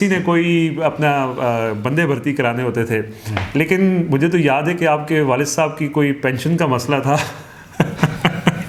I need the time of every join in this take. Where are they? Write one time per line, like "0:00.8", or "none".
none